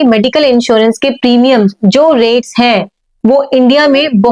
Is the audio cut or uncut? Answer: uncut